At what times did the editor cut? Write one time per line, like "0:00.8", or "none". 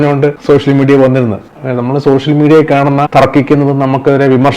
0:01.5
0:03.1